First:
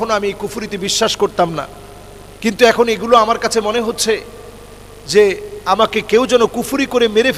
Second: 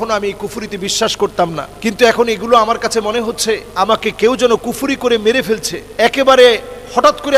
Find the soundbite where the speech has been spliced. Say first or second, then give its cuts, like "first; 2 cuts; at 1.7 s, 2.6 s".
second; 3 cuts; at 1.7 s, 3.7 s, 5.8 s